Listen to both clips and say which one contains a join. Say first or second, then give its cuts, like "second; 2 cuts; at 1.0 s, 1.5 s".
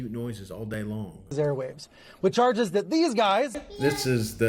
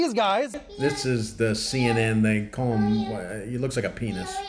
first; 1 cut; at 1.3 s